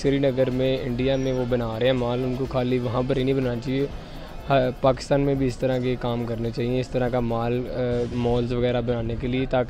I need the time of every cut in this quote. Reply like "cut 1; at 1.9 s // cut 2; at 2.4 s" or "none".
none